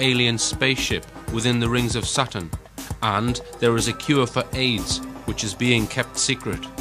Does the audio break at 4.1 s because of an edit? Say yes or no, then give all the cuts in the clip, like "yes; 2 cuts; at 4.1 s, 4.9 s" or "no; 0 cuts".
no; 0 cuts